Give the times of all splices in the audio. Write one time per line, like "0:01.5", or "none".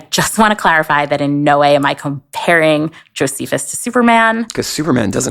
none